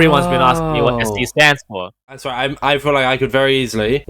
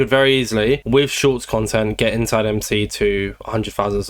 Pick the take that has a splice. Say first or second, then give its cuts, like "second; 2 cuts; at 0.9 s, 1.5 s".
first; 1 cut; at 2.1 s